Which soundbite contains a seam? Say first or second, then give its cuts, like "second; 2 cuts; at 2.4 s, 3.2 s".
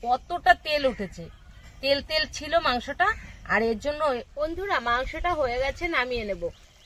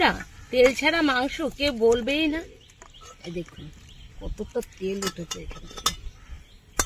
first; 1 cut; at 4.3 s